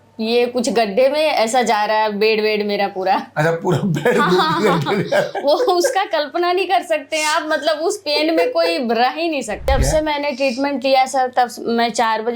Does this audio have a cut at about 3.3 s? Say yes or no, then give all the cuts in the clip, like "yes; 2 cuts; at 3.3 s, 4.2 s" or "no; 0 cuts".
no; 1 cut; at 9.7 s